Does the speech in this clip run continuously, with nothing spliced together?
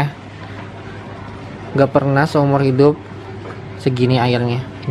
yes; 0 cuts

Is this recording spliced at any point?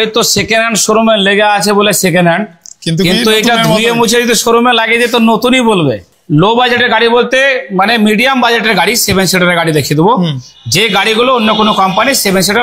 yes; 1 cut; at 6.1 s

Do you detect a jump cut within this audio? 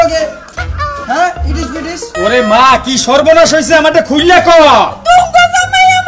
yes; 1 cut; at 2.1 s

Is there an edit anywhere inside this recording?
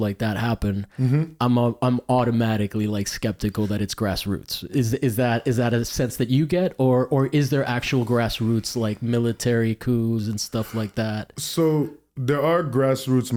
no; 0 cuts

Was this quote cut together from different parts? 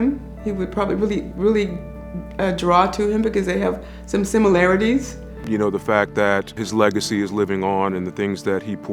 no; 0 cuts

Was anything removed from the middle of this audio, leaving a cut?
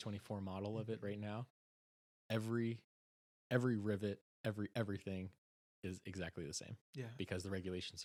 no; 0 cuts

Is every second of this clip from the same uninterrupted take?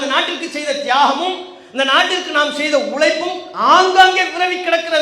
yes; 0 cuts

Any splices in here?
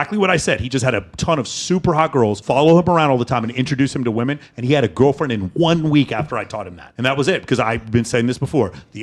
yes; 1 cut; at 2.4 s

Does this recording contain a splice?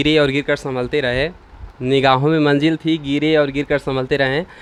no; 0 cuts

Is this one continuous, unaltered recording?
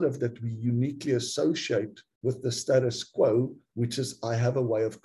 no; 2 cuts; at 2.0 s, 3.6 s

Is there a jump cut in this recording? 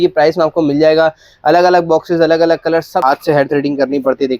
yes; 1 cut; at 3.0 s

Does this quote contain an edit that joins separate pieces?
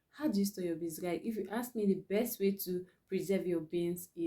no; 0 cuts

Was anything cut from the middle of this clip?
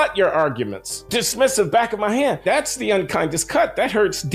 yes; 2 cuts; at 1.0 s, 2.4 s

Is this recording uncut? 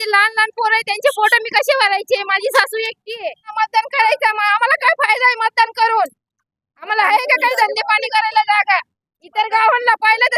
no; 1 cut; at 3.5 s

